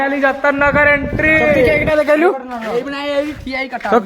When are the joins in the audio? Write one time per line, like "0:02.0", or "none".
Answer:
0:01.7